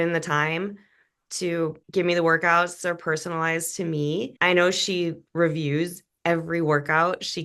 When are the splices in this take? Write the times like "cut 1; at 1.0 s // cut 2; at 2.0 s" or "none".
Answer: none